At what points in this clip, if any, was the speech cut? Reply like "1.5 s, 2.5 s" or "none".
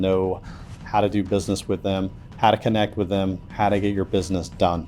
3.5 s